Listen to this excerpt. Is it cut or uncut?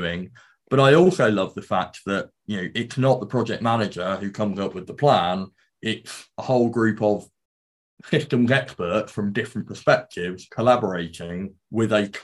uncut